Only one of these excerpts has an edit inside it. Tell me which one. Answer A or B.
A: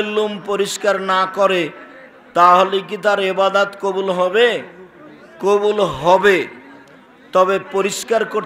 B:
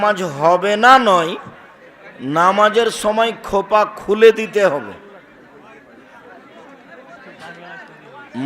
B